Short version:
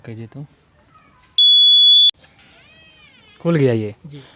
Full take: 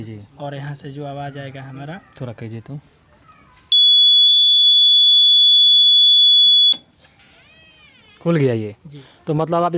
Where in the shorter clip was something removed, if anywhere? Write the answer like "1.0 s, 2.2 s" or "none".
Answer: 2.1 s